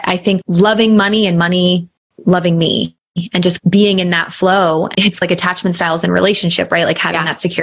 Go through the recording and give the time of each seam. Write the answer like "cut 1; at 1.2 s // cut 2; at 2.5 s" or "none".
cut 1; at 4.9 s